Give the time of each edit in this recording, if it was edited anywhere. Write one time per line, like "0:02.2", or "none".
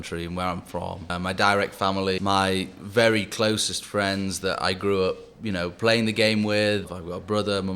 0:01.1
0:02.2
0:06.9